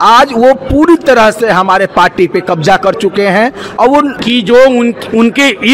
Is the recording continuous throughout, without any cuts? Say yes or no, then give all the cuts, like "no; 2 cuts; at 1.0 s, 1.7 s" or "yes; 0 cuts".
no; 1 cut; at 4.2 s